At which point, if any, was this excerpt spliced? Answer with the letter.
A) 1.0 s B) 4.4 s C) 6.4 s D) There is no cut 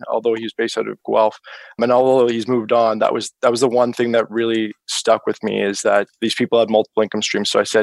A